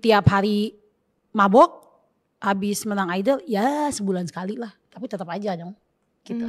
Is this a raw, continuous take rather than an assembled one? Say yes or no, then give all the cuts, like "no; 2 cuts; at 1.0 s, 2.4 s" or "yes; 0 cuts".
yes; 0 cuts